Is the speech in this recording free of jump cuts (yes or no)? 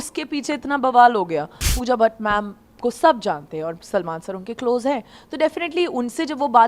no